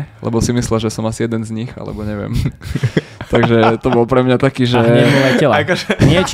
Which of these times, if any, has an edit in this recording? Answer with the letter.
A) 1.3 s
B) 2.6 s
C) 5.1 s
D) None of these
D